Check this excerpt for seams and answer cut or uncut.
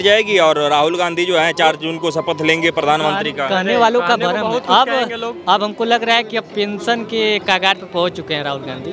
uncut